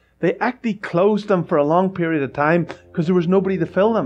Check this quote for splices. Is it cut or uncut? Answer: uncut